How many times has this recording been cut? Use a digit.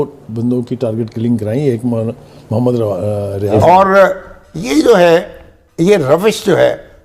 1